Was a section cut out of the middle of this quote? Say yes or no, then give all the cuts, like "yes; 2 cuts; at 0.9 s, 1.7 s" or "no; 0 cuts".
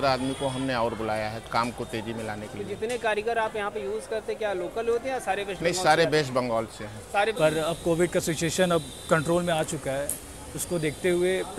yes; 1 cut; at 7.3 s